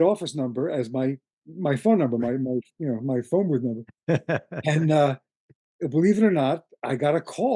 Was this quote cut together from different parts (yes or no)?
no